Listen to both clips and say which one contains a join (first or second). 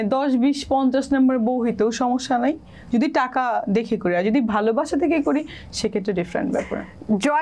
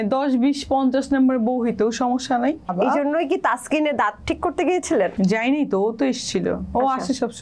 second